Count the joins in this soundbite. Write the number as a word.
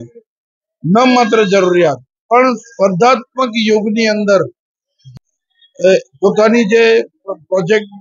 one